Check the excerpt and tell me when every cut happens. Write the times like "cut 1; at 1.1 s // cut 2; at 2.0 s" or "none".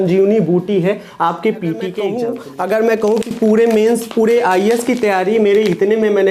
cut 1; at 2.2 s